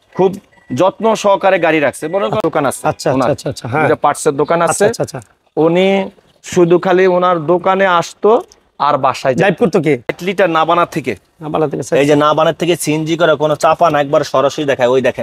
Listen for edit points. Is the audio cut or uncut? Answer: cut